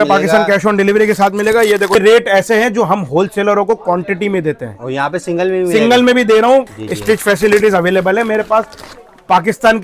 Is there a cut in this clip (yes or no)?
yes